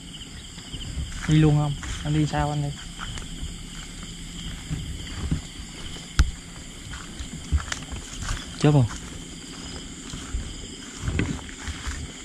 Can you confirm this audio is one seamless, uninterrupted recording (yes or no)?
yes